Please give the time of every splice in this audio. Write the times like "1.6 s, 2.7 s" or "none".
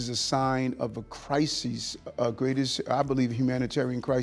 none